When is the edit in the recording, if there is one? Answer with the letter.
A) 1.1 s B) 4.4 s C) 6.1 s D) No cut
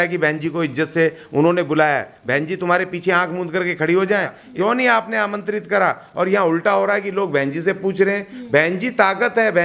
B